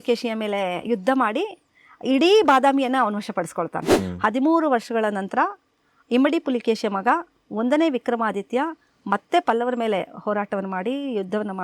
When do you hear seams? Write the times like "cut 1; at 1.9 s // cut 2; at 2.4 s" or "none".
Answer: cut 1; at 3.9 s

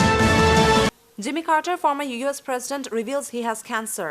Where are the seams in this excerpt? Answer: cut 1; at 1.0 s

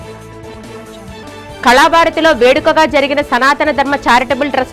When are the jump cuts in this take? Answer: cut 1; at 1.2 s

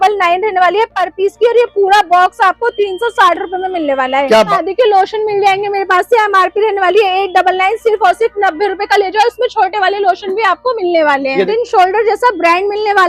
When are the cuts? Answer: cut 1; at 4.5 s // cut 2; at 11.5 s

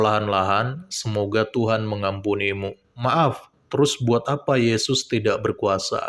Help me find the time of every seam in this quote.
cut 1; at 2.9 s

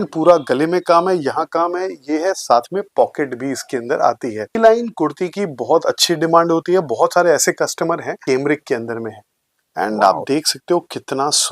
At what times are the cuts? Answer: cut 1; at 4.6 s // cut 2; at 8.2 s

